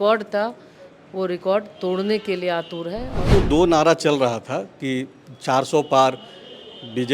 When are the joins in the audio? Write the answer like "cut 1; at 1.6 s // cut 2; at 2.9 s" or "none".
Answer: cut 1; at 3.2 s